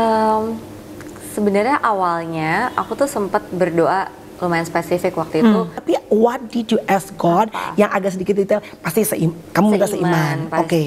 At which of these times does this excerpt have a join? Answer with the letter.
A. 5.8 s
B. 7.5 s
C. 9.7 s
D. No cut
A